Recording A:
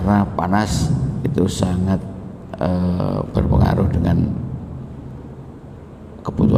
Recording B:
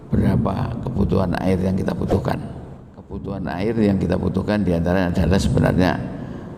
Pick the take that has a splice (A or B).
B